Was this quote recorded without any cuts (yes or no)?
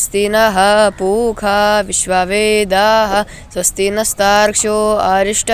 yes